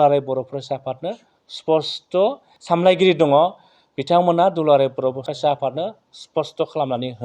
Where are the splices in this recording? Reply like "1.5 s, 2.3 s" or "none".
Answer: 2.5 s, 5.3 s